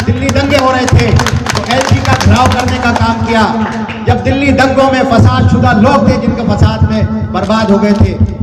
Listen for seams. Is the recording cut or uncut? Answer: uncut